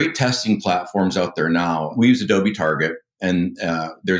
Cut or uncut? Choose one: uncut